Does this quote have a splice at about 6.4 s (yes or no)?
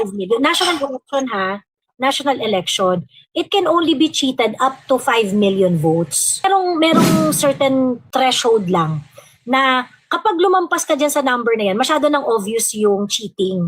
yes